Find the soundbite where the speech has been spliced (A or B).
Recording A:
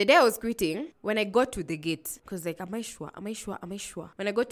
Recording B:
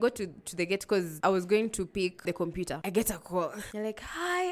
B